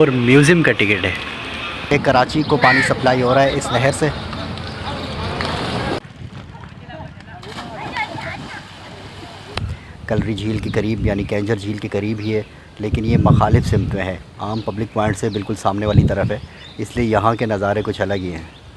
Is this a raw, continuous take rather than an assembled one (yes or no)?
no